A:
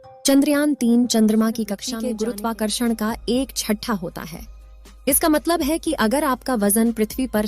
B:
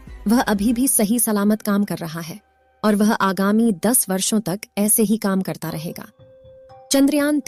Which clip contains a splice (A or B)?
A